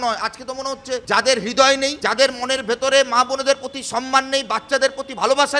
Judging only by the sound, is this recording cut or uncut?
cut